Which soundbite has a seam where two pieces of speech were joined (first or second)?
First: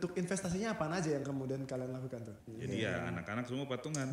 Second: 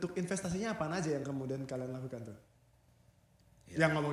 first